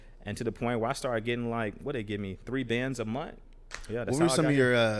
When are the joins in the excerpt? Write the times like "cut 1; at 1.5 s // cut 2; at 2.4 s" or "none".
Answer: cut 1; at 3.4 s